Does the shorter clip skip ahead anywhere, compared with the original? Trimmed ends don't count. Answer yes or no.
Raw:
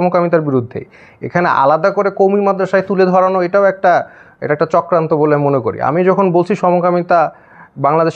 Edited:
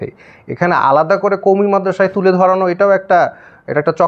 no